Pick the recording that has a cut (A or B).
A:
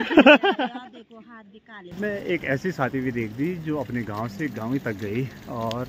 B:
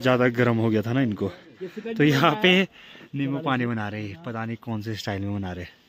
A